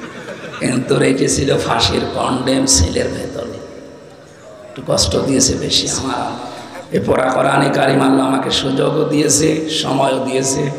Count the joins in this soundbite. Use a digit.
1